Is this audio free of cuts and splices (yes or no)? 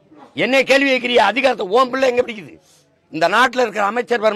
yes